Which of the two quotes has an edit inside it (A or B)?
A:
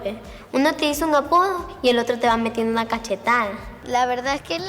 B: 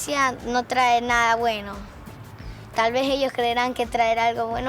A